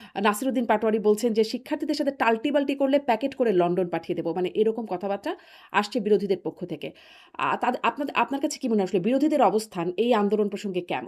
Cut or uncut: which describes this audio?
uncut